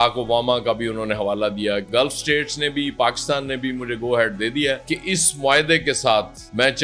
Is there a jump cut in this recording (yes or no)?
yes